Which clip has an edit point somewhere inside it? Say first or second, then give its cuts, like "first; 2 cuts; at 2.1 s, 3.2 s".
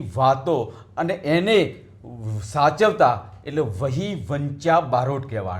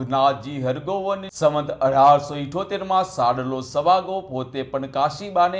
second; 1 cut; at 1.3 s